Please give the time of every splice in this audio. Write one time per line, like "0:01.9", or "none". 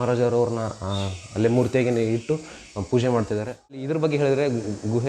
0:03.9